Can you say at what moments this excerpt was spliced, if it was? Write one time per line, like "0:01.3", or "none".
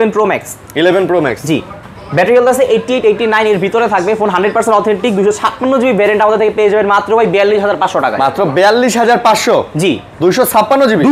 none